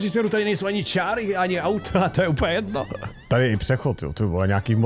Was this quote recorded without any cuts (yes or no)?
no